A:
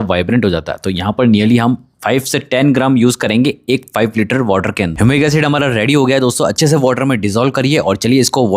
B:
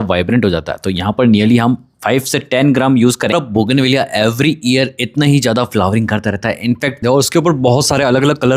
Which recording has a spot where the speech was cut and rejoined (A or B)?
B